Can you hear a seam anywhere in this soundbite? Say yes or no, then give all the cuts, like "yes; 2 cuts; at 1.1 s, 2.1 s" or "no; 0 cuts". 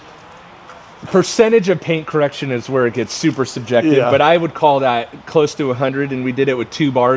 no; 0 cuts